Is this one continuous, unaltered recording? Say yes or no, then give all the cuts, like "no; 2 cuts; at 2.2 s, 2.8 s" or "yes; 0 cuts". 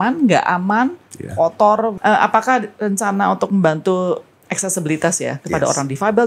no; 2 cuts; at 1.9 s, 4.3 s